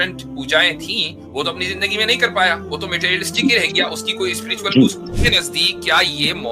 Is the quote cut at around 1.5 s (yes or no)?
no